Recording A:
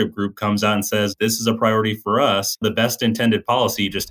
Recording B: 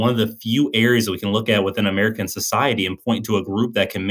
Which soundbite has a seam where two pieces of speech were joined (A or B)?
A